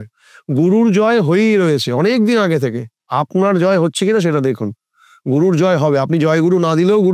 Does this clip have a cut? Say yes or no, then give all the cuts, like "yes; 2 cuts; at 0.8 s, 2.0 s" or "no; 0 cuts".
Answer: yes; 1 cut; at 3.0 s